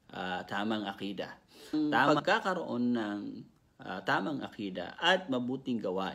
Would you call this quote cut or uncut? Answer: cut